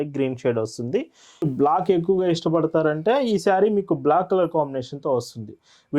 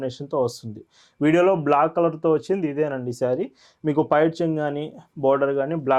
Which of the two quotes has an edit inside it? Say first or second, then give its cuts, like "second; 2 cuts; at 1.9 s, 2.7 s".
first; 1 cut; at 1.5 s